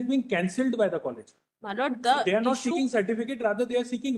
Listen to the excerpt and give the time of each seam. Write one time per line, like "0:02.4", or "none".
none